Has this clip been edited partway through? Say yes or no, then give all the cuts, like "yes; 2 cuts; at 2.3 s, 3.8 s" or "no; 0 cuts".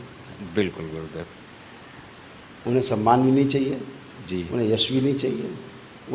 no; 0 cuts